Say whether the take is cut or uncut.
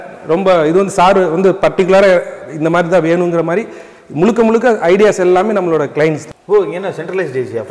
cut